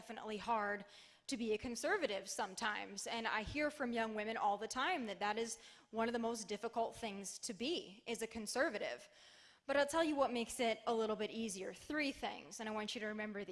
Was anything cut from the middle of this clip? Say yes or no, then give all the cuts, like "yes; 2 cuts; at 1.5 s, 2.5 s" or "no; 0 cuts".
yes; 1 cut; at 4.7 s